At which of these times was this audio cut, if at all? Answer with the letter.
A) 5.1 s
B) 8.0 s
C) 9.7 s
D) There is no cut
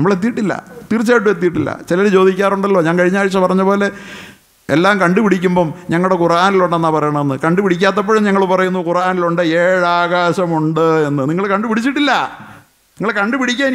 D